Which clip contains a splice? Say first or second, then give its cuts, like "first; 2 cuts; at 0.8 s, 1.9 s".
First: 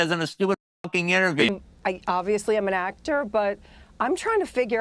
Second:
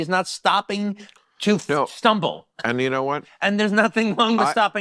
first; 1 cut; at 1.5 s